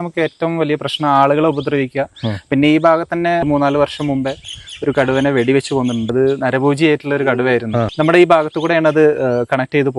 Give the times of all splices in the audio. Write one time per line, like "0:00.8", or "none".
0:03.4
0:06.1
0:07.9